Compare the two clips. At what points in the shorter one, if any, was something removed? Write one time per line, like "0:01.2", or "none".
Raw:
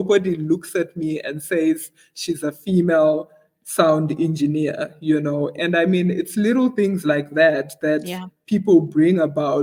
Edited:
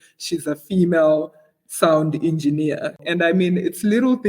0:03.0